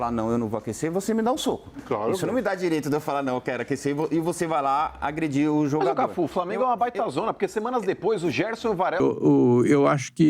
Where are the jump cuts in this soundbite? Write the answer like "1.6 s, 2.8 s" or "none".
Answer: 9.0 s